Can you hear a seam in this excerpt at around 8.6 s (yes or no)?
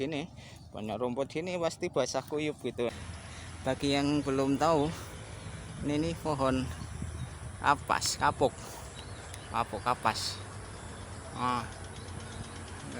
no